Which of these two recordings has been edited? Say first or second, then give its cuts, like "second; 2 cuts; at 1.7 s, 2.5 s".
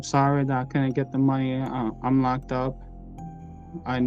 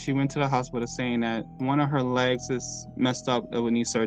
second; 1 cut; at 1.5 s